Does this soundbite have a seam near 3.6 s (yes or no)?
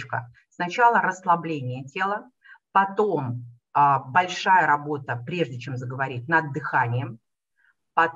no